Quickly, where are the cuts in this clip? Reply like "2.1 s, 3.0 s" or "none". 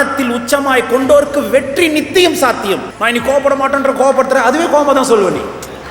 2.9 s